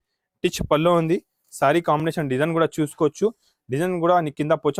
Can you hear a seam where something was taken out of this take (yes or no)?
no